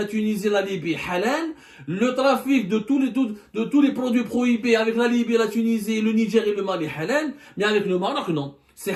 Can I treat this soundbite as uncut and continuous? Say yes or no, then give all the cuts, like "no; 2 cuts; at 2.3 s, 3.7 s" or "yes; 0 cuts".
yes; 0 cuts